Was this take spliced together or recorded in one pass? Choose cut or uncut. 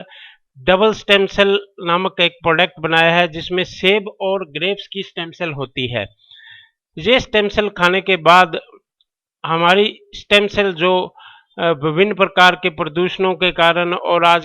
cut